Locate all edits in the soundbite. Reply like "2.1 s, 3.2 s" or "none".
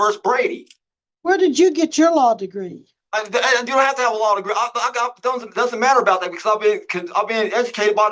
none